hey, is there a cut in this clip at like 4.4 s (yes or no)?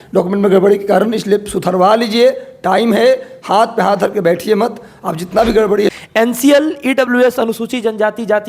no